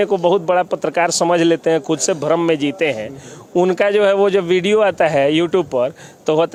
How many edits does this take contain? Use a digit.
0